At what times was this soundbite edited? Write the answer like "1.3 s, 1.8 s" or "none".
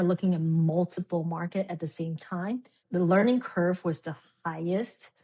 2.8 s